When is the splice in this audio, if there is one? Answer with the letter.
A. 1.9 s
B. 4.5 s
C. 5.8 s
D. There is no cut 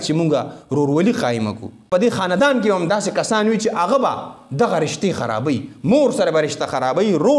A